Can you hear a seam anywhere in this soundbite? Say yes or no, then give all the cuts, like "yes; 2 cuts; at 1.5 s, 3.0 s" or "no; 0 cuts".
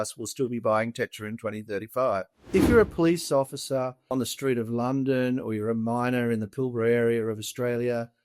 yes; 1 cut; at 2.4 s